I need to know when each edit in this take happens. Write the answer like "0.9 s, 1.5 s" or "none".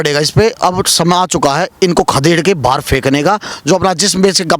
3.5 s